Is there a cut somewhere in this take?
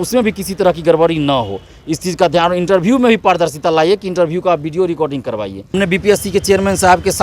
yes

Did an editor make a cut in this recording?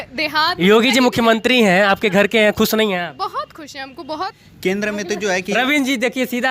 yes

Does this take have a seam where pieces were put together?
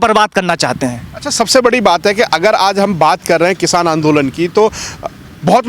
no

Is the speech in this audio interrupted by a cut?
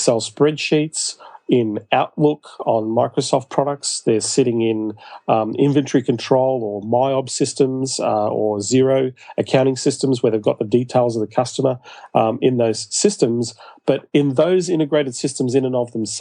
no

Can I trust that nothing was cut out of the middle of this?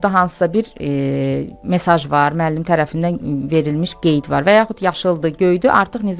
yes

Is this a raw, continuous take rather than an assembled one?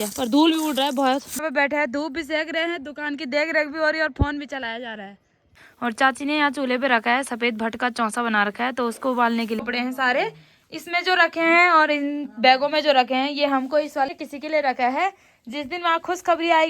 no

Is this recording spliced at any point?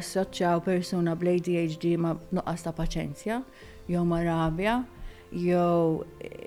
no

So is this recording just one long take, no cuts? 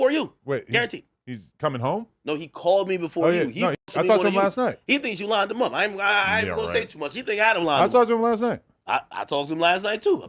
yes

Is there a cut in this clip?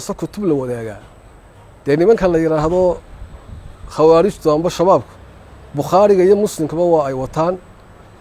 no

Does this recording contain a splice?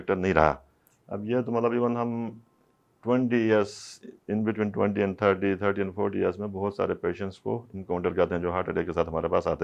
no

